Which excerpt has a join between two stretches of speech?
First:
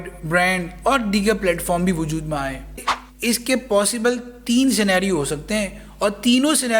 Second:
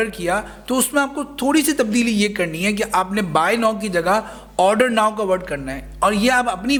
first; 1 cut; at 2.9 s

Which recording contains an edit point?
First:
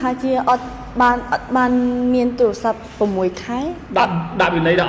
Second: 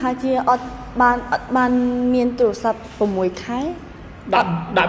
first; 1 cut; at 3.8 s

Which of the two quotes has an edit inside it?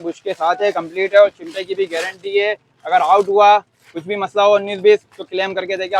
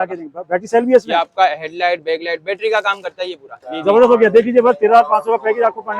second; 1 cut; at 3.5 s

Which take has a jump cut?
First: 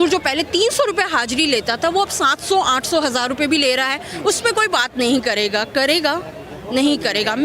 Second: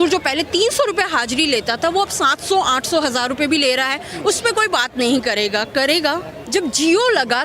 second; 1 cut; at 6.3 s

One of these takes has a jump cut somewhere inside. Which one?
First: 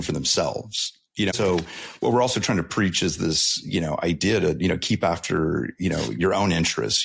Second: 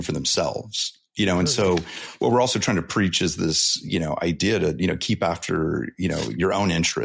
first; 1 cut; at 1.3 s

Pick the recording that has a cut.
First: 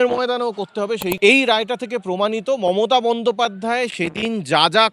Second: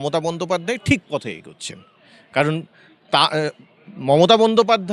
first; 1 cut; at 1.2 s

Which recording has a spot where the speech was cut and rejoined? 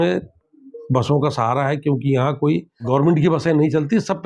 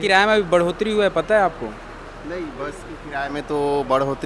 first; 1 cut; at 2.9 s

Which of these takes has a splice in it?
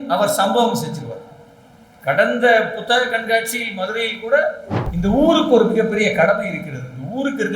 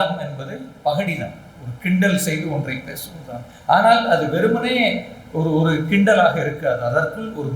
first; 1 cut; at 4.7 s

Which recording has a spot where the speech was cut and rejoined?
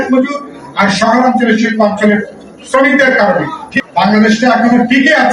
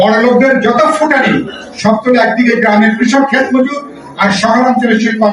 first; 1 cut; at 3.7 s

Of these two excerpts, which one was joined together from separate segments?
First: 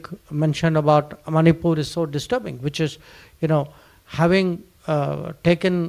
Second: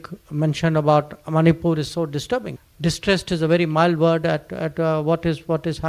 second; 1 cut; at 2.6 s

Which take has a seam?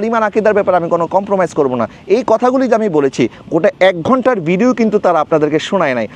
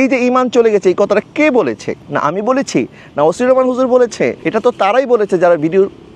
second; 1 cut; at 1.9 s

